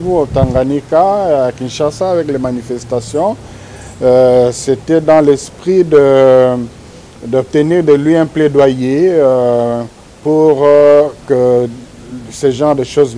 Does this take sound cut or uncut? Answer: uncut